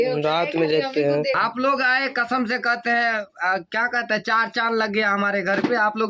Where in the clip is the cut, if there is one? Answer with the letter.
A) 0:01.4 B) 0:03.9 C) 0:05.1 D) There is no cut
A